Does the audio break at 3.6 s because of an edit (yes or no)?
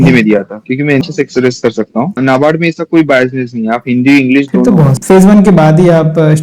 no